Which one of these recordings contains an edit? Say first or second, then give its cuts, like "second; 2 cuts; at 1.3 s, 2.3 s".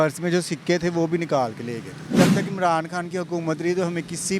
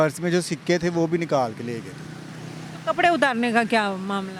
first; 1 cut; at 2.1 s